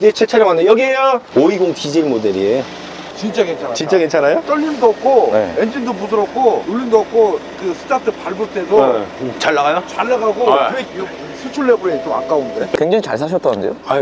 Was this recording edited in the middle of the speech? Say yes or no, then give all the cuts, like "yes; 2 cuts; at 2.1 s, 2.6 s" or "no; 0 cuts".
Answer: yes; 4 cuts; at 1.3 s, 4.4 s, 6.7 s, 12.7 s